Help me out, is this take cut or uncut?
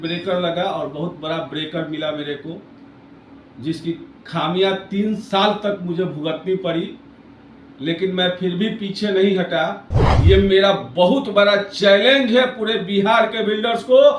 cut